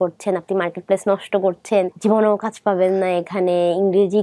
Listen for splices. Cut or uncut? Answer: uncut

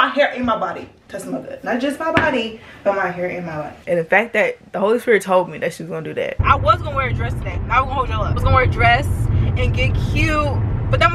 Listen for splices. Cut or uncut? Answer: cut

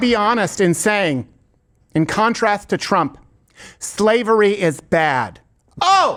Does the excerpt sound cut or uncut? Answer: uncut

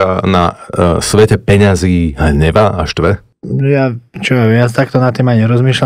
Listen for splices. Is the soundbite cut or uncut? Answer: cut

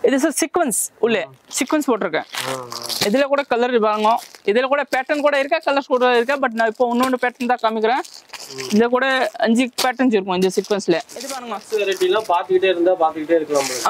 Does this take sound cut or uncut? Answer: cut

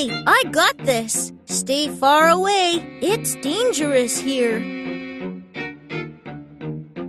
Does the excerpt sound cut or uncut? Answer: cut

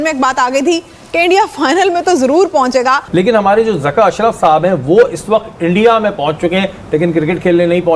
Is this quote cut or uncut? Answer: cut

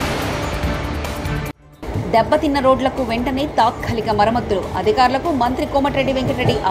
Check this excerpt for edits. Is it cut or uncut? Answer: cut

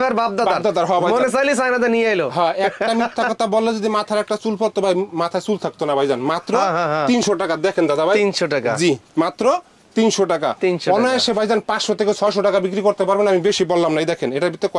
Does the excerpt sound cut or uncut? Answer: uncut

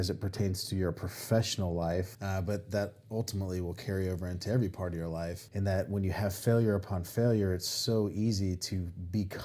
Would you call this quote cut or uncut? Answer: cut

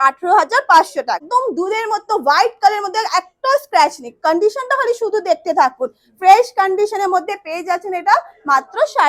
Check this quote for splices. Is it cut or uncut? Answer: cut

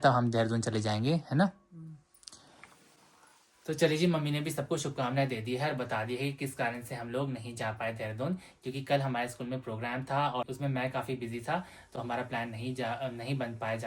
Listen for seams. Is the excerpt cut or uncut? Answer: uncut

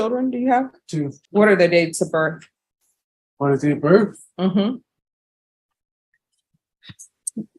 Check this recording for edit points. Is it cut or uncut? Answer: cut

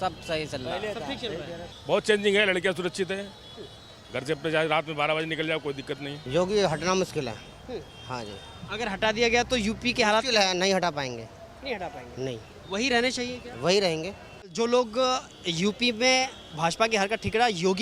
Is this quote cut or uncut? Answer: cut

